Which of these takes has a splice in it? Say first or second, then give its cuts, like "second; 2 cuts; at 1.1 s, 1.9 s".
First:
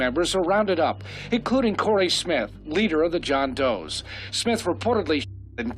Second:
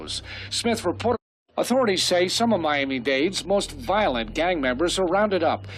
second; 1 cut; at 1.2 s